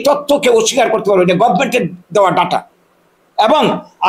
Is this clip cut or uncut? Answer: uncut